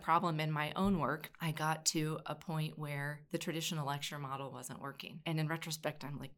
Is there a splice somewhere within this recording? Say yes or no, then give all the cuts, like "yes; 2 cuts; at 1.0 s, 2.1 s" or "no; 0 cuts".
yes; 2 cuts; at 1.3 s, 3.2 s